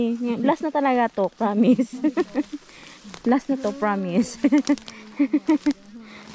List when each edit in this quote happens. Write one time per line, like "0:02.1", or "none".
none